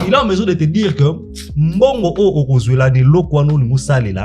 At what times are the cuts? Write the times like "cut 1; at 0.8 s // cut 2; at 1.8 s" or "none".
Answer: none